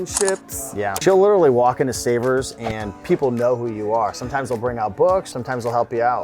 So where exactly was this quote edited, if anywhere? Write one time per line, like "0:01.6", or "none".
0:01.0
0:05.3